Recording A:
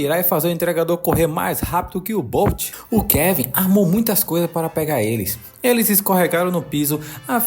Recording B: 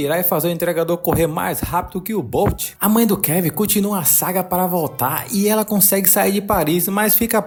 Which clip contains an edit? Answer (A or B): A